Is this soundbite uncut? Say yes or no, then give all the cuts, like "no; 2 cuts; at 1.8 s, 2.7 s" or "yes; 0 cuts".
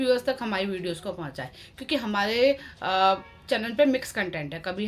yes; 0 cuts